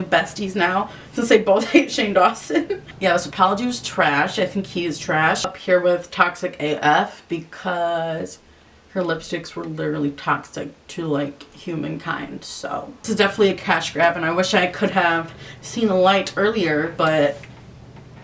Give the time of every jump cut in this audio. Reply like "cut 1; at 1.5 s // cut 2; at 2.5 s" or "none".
cut 1; at 2.8 s // cut 2; at 5.6 s // cut 3; at 13.0 s